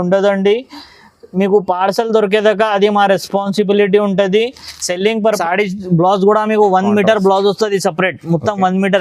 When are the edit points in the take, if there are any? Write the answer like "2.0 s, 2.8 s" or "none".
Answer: 5.4 s